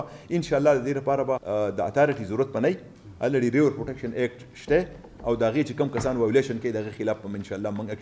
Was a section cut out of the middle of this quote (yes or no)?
yes